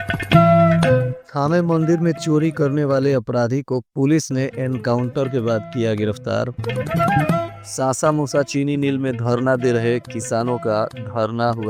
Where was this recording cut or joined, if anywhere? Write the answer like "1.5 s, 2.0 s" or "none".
1.2 s